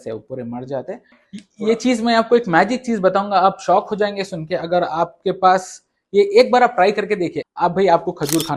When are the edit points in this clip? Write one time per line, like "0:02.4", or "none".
0:01.2
0:07.4

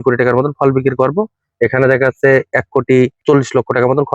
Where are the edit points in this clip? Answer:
0:03.2

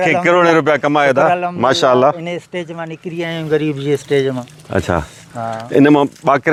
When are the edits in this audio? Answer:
none

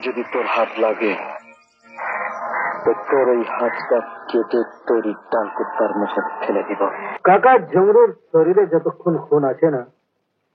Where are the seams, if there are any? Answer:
0:07.1

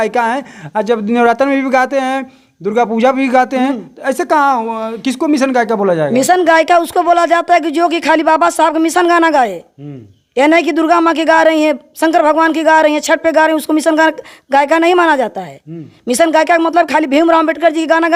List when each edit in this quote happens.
none

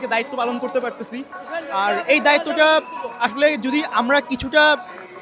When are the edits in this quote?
none

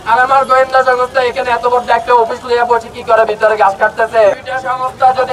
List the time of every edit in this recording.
0:04.3

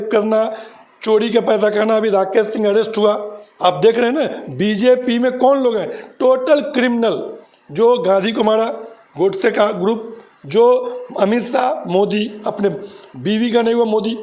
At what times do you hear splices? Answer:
none

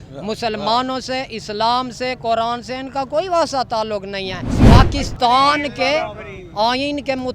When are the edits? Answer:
0:04.5

